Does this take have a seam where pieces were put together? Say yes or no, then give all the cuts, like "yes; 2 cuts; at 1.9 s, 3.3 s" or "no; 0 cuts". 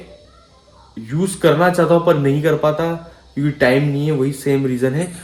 no; 0 cuts